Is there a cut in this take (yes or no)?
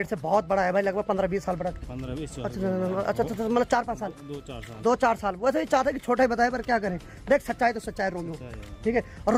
no